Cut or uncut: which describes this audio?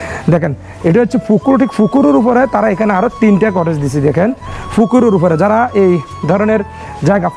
uncut